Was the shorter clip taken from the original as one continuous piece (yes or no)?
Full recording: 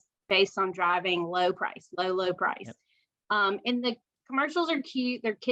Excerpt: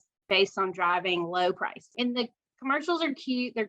no